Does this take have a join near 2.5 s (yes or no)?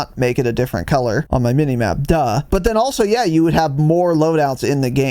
yes